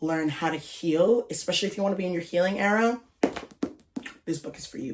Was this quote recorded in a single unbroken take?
yes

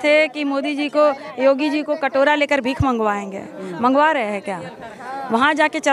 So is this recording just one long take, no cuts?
yes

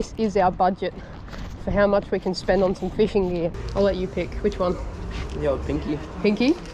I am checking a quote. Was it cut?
yes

